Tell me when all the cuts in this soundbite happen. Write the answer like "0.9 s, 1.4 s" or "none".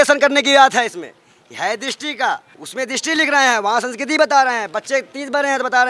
2.6 s